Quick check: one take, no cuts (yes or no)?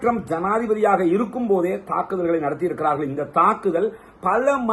yes